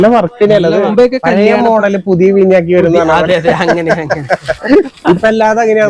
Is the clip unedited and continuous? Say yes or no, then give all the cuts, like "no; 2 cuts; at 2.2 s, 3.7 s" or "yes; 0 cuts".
no; 1 cut; at 0.9 s